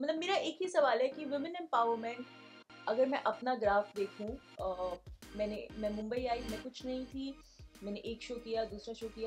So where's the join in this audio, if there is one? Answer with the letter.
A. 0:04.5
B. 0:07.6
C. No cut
C